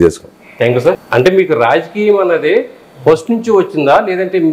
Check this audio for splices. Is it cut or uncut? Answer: cut